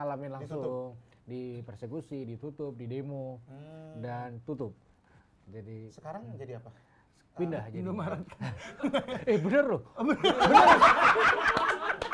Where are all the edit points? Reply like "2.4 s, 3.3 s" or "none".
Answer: none